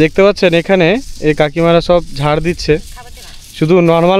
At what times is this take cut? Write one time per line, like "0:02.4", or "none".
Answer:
none